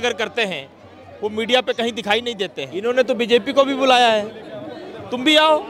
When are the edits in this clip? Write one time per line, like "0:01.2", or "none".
0:02.7